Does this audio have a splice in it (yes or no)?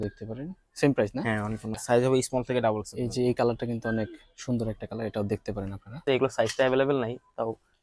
yes